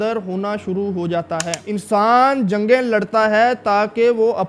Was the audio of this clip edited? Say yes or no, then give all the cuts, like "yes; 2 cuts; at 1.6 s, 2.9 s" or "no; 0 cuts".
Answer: yes; 1 cut; at 1.6 s